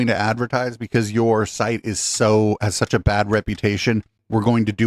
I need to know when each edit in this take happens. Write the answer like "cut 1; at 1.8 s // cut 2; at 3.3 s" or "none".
none